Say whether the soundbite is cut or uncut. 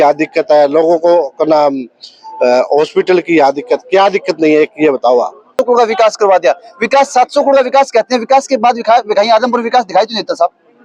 cut